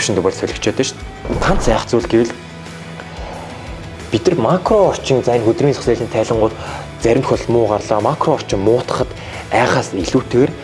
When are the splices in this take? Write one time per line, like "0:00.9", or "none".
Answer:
0:01.4